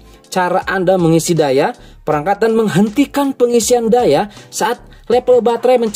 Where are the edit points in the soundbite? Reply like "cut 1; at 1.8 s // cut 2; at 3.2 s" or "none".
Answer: none